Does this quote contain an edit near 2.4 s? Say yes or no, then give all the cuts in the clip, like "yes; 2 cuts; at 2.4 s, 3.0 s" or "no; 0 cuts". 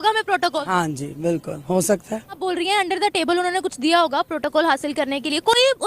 yes; 1 cut; at 2.4 s